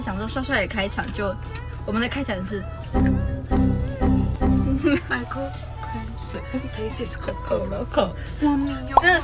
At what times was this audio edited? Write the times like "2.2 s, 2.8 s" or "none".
none